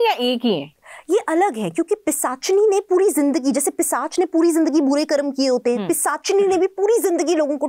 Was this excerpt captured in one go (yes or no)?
yes